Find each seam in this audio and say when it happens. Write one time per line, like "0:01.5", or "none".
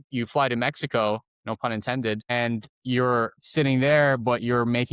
0:02.7
0:03.4